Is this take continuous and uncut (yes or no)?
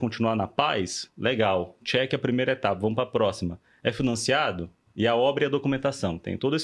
yes